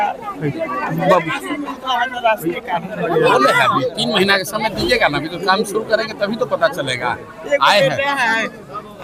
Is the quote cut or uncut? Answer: uncut